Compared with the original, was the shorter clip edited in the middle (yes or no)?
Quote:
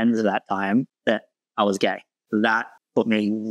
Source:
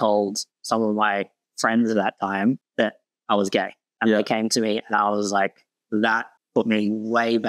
yes